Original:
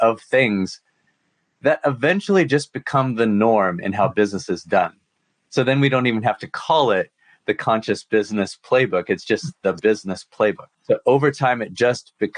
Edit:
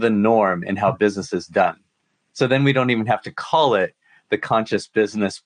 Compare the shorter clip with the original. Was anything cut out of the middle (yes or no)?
no